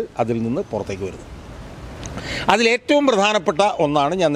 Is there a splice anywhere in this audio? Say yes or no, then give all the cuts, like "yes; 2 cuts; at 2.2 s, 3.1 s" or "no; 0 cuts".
no; 0 cuts